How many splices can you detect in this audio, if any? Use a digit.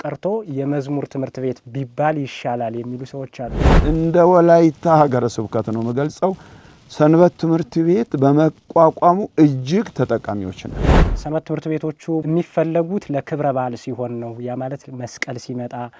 3